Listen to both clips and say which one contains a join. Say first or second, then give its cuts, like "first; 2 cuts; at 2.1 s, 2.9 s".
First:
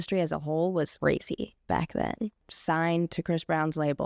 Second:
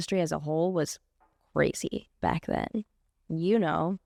first; 2 cuts; at 0.9 s, 2.5 s